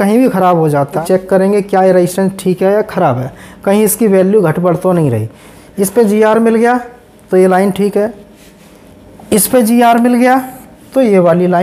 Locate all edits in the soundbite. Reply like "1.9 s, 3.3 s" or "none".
1.0 s, 5.5 s